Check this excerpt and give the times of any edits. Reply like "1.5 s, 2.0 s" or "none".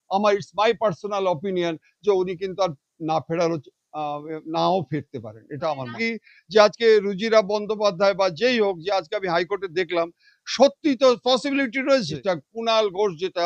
6.0 s, 12.1 s